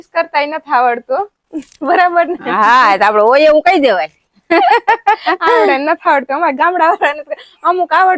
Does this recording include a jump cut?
no; 0 cuts

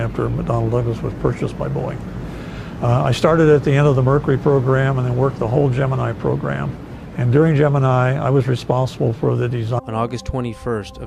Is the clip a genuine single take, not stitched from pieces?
yes; 0 cuts

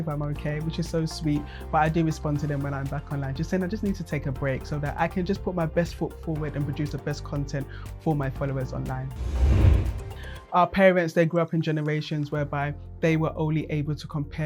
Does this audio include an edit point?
yes; 2 cuts; at 9.2 s, 10.2 s

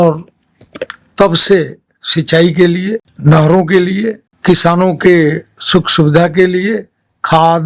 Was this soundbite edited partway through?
yes; 2 cuts; at 3.1 s, 4.3 s

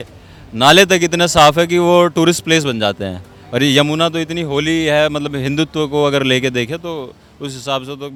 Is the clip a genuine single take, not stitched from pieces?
yes; 0 cuts

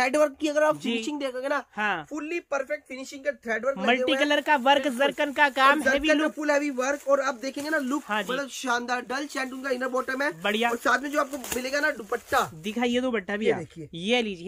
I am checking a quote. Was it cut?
no; 0 cuts

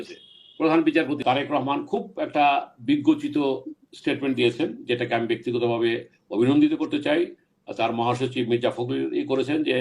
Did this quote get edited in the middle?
yes; 1 cut; at 1.2 s

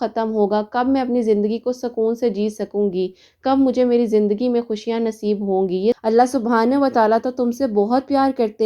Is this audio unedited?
no; 1 cut; at 6.0 s

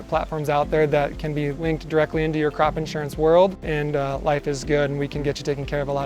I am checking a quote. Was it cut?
yes; 2 cuts; at 1.6 s, 3.7 s

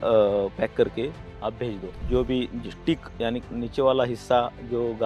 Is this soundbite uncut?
no; 1 cut; at 1.9 s

